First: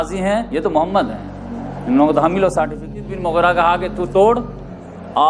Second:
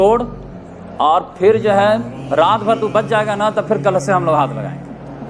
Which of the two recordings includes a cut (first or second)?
first